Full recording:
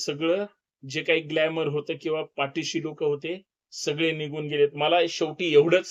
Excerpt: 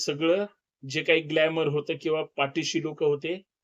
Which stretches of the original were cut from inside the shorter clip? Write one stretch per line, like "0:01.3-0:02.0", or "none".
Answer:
none